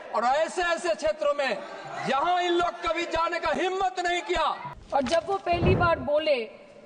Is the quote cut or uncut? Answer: cut